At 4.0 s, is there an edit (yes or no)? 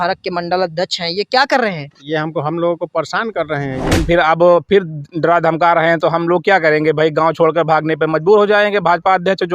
yes